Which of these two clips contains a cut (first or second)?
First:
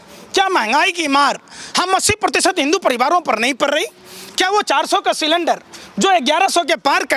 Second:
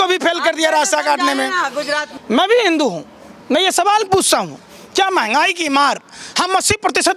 second